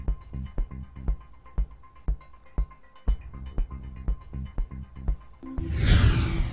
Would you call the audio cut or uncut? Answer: cut